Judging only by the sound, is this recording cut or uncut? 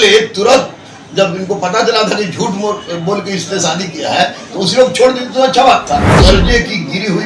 cut